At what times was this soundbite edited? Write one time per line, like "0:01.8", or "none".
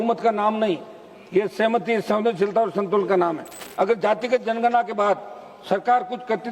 0:03.6

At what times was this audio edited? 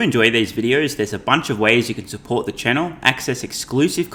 none

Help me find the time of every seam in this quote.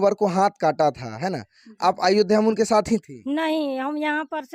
none

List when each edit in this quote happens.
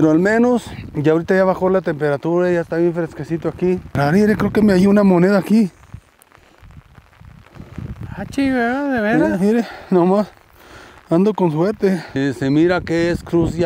0:04.0
0:12.2

